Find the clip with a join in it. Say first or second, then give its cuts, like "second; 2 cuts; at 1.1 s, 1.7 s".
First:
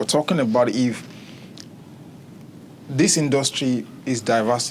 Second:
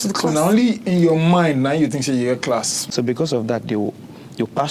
second; 1 cut; at 2.8 s